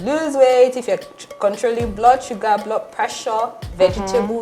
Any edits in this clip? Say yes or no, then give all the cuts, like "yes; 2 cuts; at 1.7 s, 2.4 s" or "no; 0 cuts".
no; 0 cuts